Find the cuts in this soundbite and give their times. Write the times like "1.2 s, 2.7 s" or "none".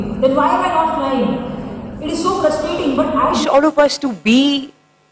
3.4 s